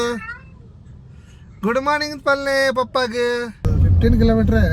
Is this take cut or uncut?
cut